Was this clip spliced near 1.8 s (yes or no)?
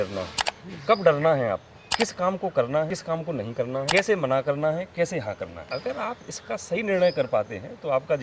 yes